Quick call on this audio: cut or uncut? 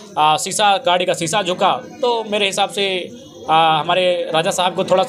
uncut